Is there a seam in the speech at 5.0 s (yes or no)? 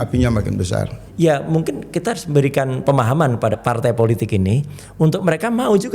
no